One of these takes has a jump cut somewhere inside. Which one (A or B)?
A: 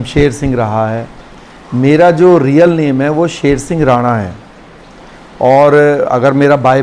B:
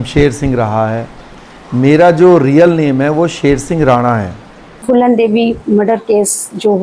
B